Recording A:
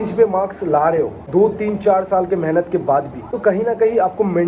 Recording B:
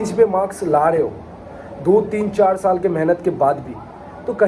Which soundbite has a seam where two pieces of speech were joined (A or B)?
A